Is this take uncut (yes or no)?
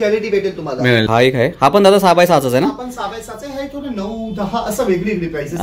no